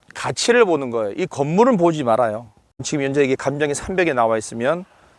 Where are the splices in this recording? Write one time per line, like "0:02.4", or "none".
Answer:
0:02.9

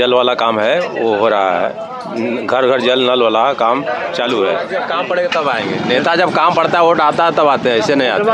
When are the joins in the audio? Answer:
0:04.8

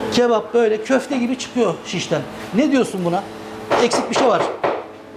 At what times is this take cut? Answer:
0:03.7

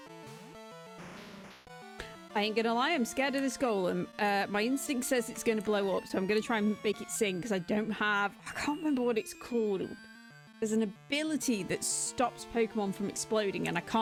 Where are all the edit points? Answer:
none

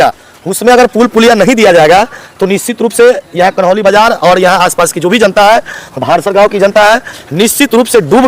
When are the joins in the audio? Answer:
none

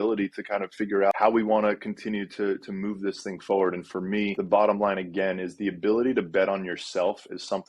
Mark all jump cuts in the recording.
0:01.1
0:04.4

